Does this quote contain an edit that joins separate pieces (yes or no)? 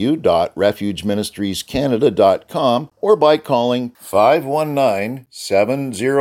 yes